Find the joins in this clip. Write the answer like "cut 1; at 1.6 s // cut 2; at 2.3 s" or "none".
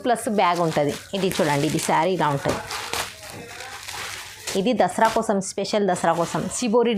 none